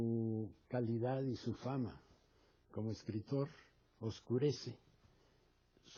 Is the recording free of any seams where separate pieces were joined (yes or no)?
yes